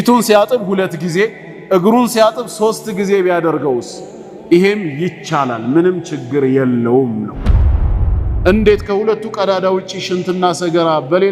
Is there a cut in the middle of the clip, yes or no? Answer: yes